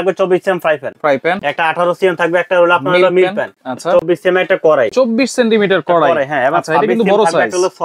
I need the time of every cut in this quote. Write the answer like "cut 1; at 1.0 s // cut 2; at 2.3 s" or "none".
none